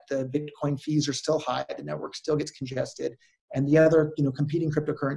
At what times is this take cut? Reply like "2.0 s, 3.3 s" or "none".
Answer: none